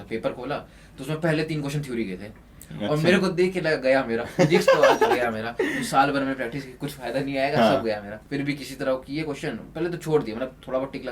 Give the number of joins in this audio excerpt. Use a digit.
1